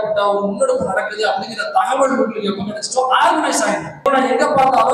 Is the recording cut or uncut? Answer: cut